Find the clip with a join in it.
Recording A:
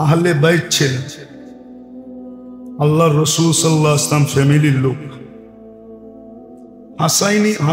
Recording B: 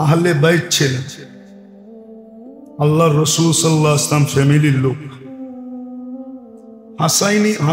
B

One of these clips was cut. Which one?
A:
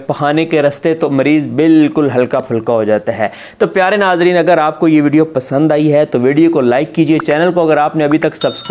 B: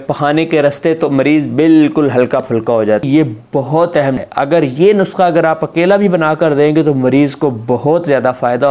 B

